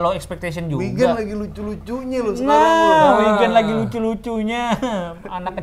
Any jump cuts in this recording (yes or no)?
no